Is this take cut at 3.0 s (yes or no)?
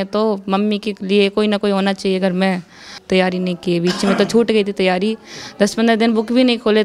yes